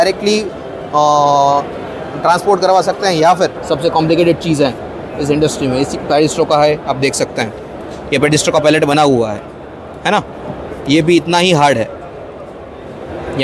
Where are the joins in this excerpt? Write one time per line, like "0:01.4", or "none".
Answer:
0:03.6